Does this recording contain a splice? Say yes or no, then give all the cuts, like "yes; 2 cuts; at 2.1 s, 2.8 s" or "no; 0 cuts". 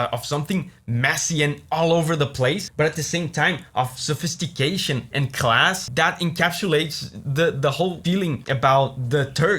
yes; 2 cuts; at 2.7 s, 5.8 s